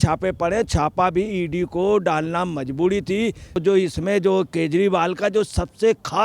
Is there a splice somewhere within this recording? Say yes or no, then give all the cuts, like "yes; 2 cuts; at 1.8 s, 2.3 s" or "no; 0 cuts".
yes; 1 cut; at 3.6 s